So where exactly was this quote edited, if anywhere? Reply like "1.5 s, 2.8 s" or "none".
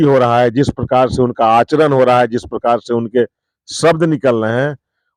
none